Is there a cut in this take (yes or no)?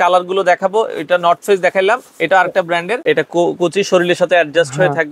yes